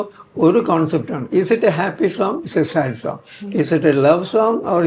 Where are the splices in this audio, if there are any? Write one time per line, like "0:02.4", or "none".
none